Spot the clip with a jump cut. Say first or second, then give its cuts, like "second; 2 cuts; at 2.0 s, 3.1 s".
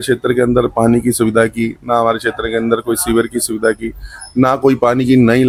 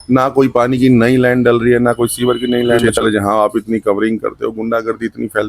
second; 1 cut; at 2.8 s